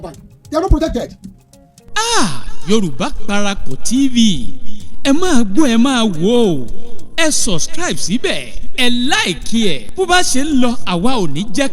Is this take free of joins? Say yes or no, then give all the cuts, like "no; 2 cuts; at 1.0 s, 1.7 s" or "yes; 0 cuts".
no; 1 cut; at 1.9 s